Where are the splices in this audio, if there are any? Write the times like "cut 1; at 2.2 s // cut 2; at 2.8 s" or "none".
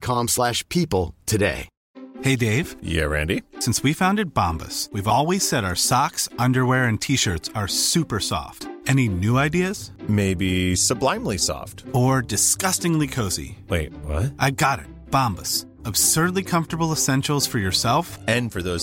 none